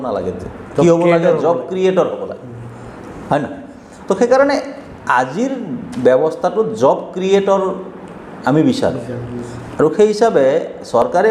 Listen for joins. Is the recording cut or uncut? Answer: uncut